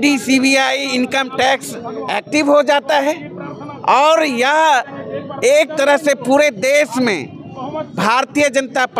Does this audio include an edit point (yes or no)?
no